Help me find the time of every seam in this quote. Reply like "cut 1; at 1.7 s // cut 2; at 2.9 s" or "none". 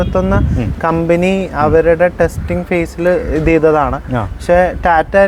none